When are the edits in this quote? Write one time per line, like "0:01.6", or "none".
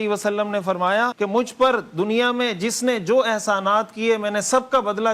0:01.1